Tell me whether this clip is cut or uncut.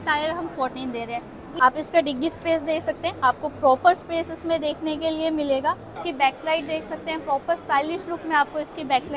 cut